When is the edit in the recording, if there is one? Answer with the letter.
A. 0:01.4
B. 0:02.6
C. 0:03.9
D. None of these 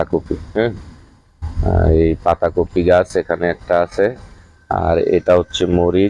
D